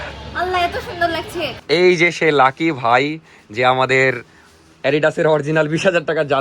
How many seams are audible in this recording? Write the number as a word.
one